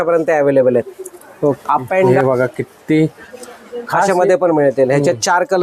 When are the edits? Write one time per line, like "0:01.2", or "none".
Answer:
0:02.1